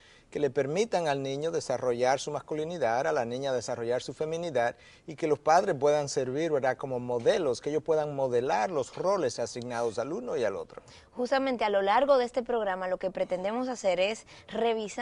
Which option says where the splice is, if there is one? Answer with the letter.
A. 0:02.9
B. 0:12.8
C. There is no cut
B